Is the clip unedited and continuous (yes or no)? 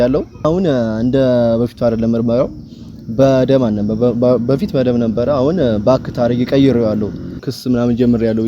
no